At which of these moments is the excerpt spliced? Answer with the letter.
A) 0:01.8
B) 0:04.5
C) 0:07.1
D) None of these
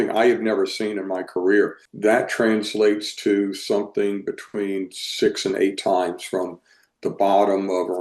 A